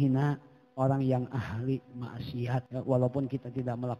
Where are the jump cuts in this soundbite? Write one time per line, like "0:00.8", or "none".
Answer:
0:02.7